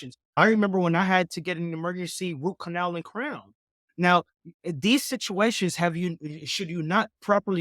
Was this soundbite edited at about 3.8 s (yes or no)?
yes